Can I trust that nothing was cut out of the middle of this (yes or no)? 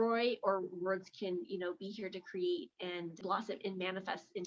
no